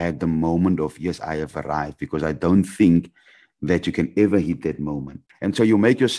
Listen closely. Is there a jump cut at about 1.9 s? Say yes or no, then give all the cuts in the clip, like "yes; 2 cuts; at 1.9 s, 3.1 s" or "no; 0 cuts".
no; 1 cut; at 5.2 s